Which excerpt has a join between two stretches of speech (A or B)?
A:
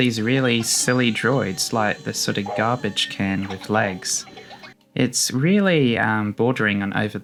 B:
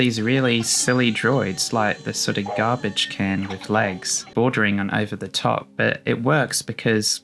B